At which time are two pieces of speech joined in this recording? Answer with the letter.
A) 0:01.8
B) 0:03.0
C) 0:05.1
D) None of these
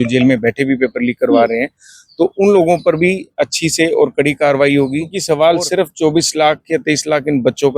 C